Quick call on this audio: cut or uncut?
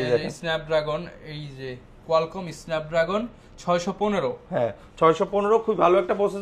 uncut